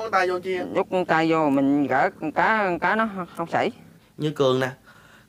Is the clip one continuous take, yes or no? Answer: no